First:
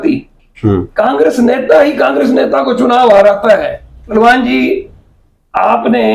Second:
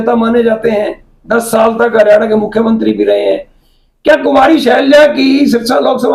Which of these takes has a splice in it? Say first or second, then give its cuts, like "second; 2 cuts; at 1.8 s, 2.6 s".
first; 1 cut; at 4.1 s